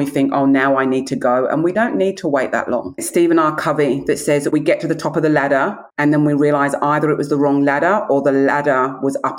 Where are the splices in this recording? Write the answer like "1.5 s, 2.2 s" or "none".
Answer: 1.7 s, 3.0 s, 5.8 s